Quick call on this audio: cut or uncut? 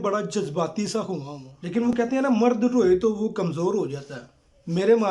cut